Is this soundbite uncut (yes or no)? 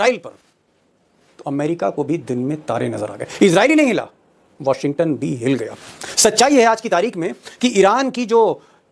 yes